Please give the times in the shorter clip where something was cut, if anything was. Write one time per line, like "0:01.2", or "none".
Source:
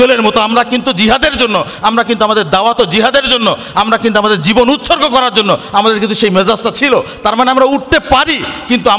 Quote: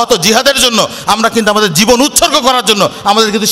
none